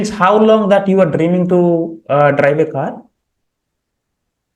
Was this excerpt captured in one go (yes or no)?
yes